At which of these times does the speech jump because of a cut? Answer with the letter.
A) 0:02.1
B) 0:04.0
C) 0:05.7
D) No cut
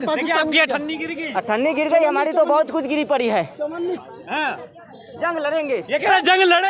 B